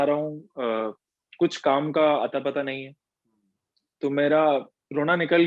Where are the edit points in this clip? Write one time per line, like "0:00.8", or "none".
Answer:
none